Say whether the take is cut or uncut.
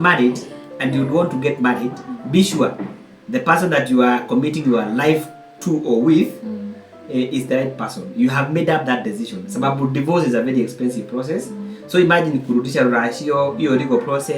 uncut